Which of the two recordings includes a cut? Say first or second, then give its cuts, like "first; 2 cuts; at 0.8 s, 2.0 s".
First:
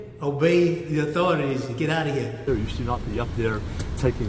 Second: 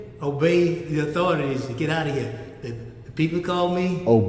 first; 1 cut; at 2.5 s